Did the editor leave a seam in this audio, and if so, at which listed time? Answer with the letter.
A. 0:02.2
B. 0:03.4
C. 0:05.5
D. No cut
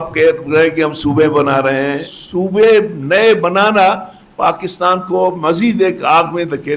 A